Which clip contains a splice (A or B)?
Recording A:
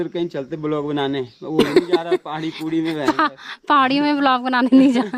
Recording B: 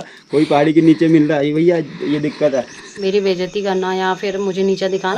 B